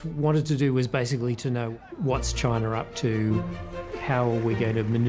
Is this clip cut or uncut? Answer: cut